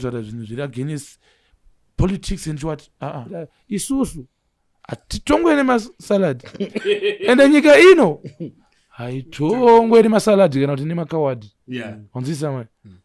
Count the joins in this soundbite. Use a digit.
1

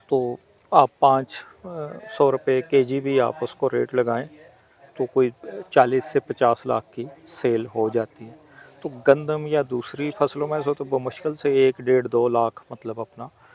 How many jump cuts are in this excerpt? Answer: 0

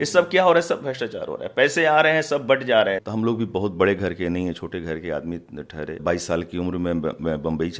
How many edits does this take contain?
2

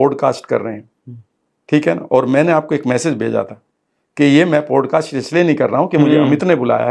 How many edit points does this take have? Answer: 0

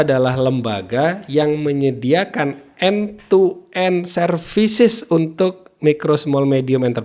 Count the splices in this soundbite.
0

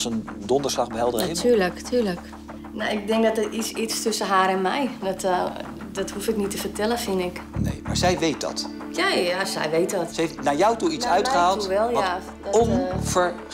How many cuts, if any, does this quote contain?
0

